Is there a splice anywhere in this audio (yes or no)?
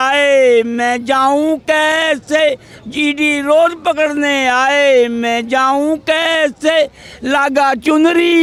no